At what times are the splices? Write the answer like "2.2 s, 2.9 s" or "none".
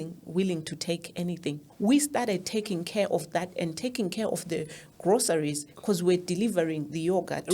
1.7 s

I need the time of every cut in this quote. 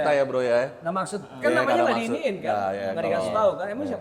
none

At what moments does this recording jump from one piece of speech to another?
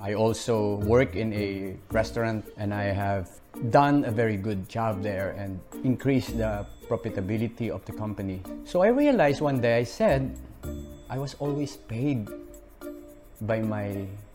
2.5 s, 3.4 s, 5.6 s, 6.7 s, 8.4 s

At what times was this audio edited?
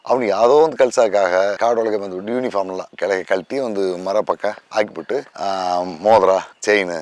none

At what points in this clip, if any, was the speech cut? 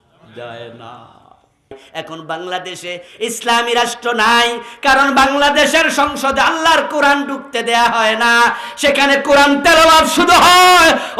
1.8 s

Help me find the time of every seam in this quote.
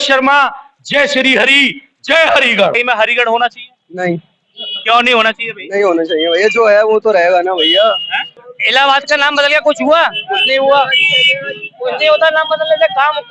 2.7 s, 8.3 s

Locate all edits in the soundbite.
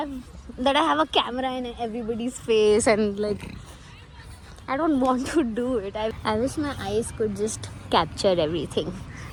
none

